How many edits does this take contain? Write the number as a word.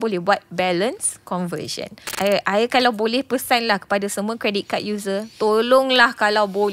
one